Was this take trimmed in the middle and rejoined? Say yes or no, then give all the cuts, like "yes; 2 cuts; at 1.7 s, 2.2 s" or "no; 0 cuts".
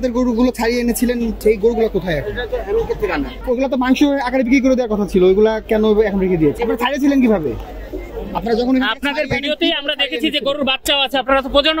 yes; 3 cuts; at 1.4 s, 3.4 s, 6.6 s